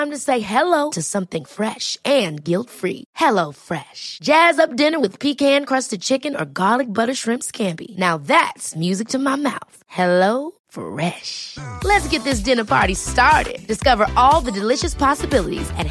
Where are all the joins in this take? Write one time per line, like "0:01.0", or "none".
none